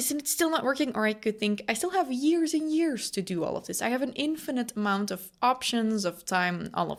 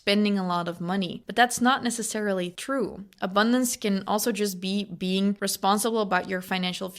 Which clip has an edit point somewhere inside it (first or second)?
second